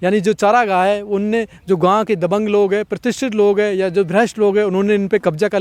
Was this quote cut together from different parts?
no; 0 cuts

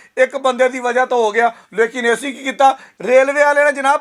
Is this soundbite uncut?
yes; 0 cuts

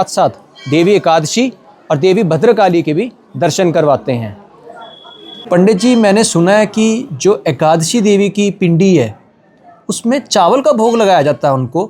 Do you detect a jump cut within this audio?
yes; 1 cut; at 5.5 s

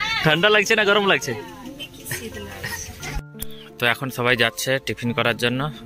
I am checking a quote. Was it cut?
yes; 1 cut; at 3.1 s

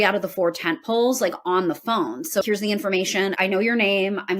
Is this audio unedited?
no; 1 cut; at 2.4 s

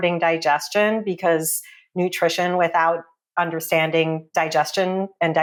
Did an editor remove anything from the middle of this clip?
no; 0 cuts

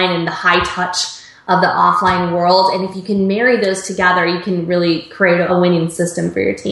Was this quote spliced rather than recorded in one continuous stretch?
yes; 1 cut; at 5.5 s

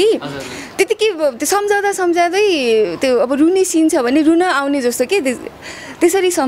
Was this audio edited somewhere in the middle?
no; 0 cuts

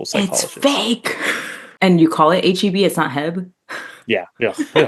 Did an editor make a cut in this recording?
yes; 1 cut; at 1.7 s

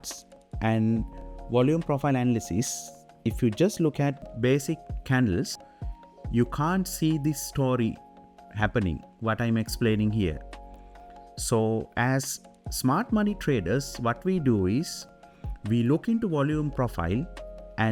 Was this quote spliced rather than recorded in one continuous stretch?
no; 0 cuts

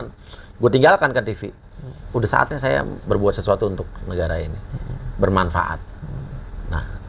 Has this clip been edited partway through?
yes; 1 cut; at 2.0 s

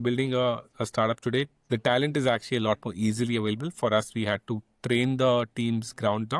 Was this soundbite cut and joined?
no; 0 cuts

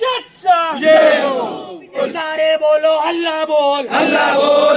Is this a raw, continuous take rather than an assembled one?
no; 1 cut; at 2.0 s

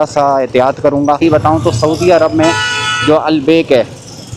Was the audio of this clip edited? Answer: yes; 1 cut; at 1.2 s

